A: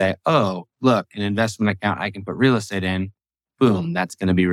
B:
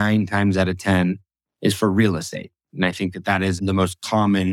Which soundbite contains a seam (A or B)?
B